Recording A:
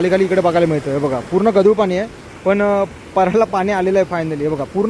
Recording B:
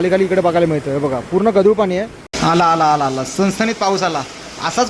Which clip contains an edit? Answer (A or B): B